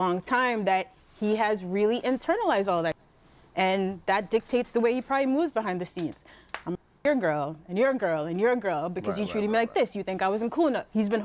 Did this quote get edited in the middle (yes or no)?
no